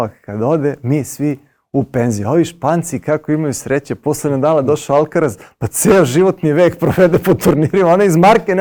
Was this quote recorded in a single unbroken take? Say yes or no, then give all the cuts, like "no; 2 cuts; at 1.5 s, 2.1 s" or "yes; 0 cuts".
yes; 0 cuts